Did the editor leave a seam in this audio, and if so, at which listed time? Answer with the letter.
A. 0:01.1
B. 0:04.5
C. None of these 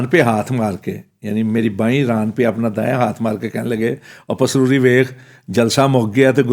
C